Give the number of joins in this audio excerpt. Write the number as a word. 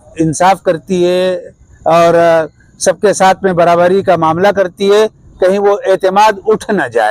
zero